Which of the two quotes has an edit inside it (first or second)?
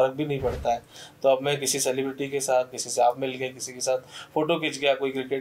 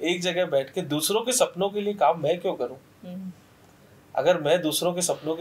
first